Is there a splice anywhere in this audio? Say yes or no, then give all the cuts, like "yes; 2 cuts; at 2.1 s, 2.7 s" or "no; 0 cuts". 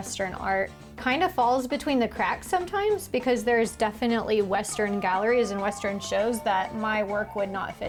no; 0 cuts